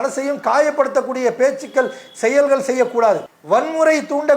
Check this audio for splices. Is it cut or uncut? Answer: cut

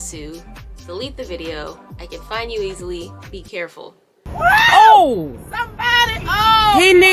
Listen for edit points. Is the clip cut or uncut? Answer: uncut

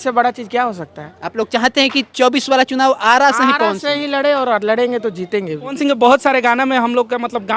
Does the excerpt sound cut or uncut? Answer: cut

